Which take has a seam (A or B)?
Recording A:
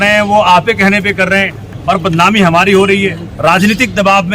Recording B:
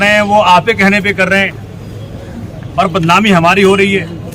A